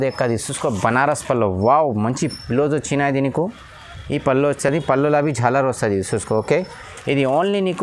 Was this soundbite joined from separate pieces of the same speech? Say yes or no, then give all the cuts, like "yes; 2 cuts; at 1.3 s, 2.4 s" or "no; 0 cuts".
no; 0 cuts